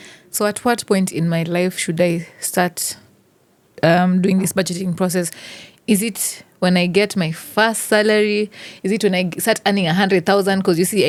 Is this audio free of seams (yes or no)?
yes